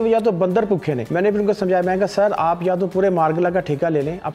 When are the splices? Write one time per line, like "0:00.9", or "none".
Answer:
0:01.0